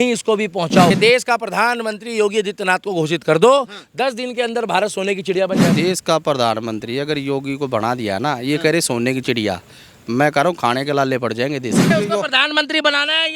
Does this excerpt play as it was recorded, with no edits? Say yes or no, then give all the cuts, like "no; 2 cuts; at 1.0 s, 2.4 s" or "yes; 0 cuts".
no; 3 cuts; at 0.9 s, 5.7 s, 11.9 s